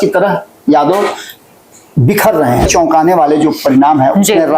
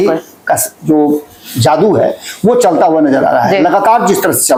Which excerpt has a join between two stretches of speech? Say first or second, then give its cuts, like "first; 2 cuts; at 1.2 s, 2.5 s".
first; 1 cut; at 2.7 s